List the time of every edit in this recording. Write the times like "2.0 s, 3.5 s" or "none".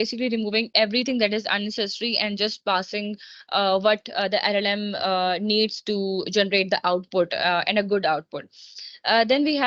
none